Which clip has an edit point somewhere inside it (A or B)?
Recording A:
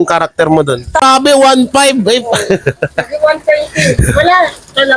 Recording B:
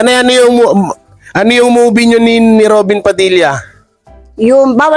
A